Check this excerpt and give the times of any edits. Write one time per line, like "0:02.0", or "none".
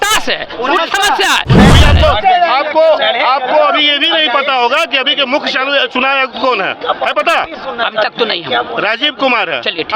0:01.7